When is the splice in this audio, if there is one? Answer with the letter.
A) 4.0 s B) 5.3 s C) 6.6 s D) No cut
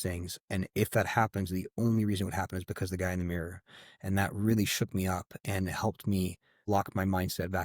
C